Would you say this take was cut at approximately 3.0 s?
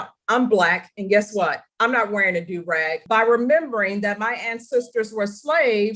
yes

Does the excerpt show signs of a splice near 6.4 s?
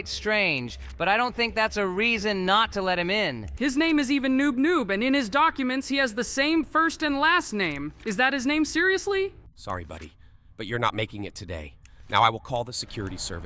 no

